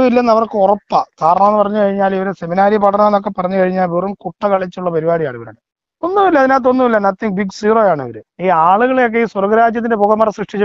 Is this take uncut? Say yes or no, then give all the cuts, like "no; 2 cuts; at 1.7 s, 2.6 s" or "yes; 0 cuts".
yes; 0 cuts